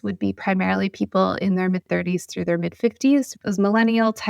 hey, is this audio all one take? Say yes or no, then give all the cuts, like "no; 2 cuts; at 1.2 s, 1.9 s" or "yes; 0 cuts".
no; 1 cut; at 3.4 s